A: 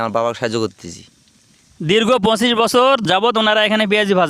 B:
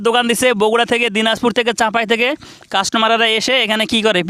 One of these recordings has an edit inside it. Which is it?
A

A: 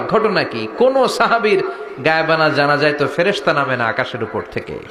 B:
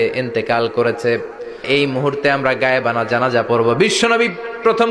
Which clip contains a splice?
B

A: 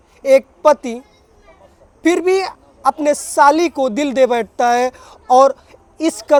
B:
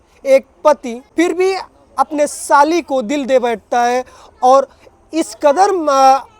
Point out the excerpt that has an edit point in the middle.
B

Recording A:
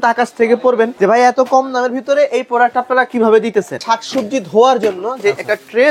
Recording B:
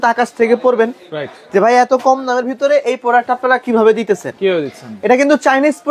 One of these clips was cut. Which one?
A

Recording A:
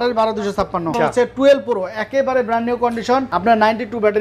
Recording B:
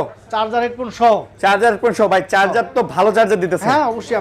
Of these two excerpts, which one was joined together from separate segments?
A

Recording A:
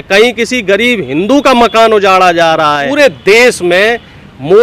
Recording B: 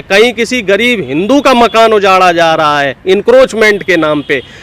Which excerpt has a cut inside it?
A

